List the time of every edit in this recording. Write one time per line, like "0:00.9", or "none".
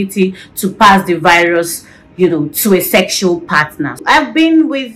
0:04.0